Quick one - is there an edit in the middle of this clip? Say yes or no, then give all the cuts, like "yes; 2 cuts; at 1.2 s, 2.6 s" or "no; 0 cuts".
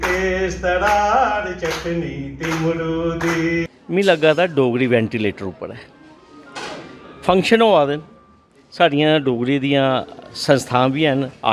yes; 1 cut; at 3.7 s